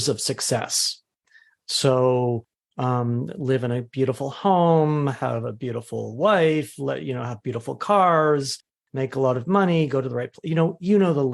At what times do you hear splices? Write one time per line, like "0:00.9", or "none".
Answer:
none